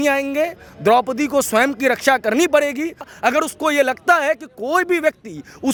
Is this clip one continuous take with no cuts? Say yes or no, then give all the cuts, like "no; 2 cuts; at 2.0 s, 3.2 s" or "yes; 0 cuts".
yes; 0 cuts